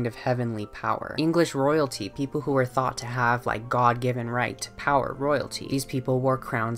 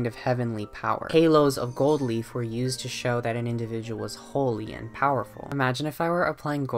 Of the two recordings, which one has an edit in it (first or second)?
second